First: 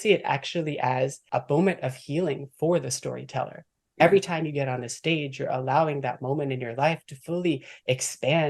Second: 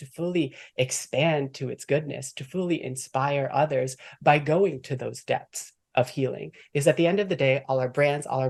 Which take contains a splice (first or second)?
first